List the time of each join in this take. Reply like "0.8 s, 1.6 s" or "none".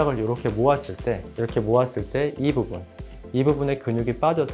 none